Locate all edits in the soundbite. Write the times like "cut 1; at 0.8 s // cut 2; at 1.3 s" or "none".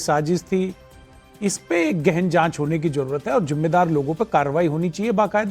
cut 1; at 2.4 s